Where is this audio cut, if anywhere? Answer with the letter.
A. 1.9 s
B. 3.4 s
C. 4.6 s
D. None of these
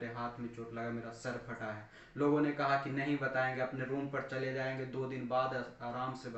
D